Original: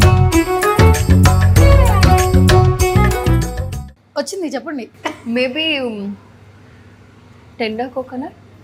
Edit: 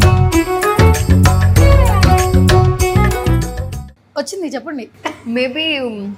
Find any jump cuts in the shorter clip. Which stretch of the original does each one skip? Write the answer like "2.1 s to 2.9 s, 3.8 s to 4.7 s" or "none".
none